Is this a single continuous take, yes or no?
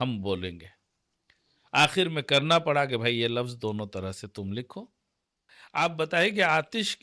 no